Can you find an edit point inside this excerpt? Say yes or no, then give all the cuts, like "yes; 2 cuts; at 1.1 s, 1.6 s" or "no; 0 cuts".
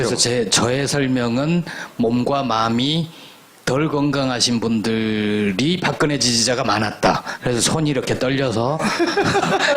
yes; 1 cut; at 7.7 s